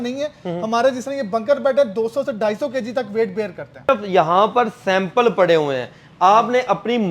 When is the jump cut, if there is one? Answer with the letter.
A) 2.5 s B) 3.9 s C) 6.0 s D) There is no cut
B